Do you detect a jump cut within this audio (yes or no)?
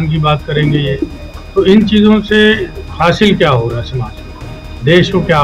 no